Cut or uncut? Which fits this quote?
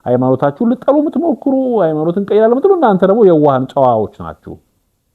uncut